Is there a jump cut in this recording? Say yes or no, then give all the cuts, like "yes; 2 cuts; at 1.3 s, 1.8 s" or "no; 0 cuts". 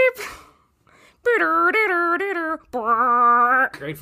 no; 0 cuts